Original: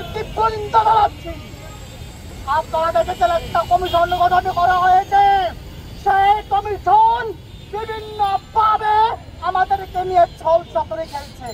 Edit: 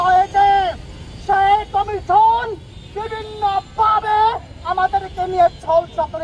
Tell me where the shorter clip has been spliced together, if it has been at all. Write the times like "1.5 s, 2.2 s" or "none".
none

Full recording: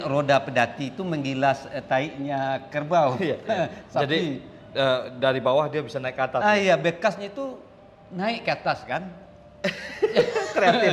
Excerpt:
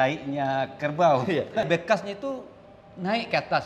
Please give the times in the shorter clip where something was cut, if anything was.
1.6 s

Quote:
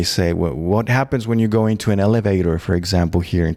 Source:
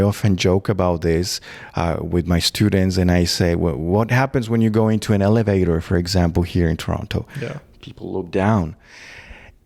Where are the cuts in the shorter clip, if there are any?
none

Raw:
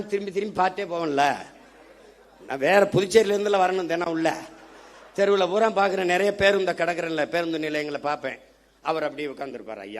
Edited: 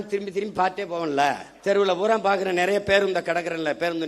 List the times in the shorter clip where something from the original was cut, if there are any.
1.5 s

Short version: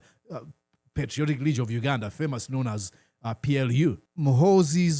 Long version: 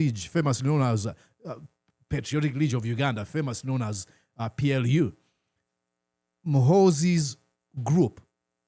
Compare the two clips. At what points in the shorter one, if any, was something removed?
4.1 s

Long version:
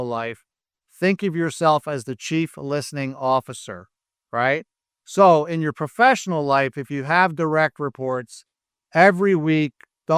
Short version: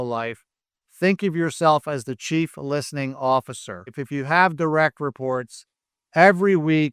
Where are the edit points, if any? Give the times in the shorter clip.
4.0 s

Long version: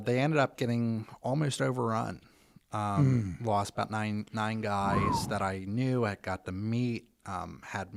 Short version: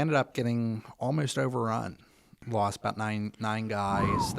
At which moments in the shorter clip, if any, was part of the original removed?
2.4 s

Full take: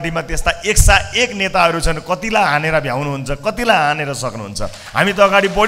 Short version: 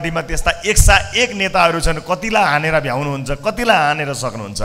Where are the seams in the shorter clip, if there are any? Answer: none

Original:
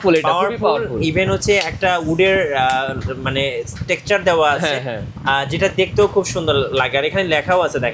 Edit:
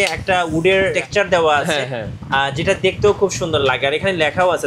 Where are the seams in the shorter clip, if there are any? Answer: 0.9 s, 3.6 s

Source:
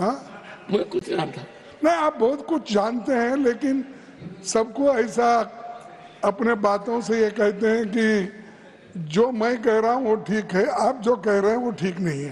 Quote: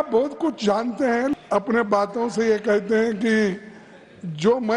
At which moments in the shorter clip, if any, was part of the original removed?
1.3 s

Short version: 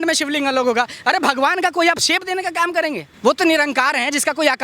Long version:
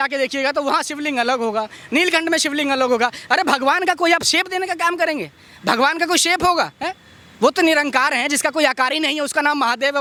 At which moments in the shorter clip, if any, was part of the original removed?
3.1 s

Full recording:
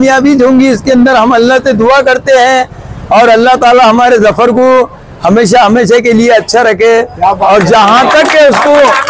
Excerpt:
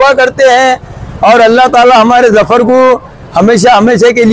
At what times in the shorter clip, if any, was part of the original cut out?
none

